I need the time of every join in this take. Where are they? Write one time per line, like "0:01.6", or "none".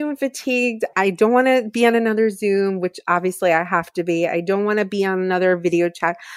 0:00.9